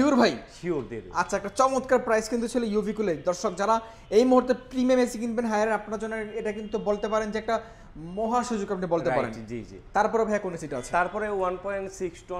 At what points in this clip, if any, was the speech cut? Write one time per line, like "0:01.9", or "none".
none

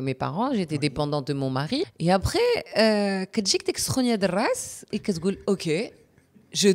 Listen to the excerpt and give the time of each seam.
0:01.9

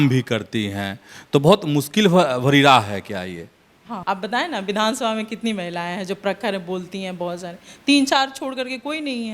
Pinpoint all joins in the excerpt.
0:03.9

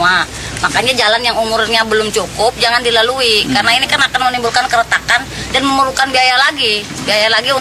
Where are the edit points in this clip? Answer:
0:06.6

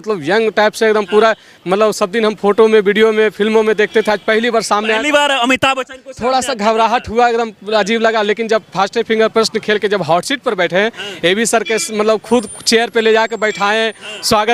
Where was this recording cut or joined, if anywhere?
none

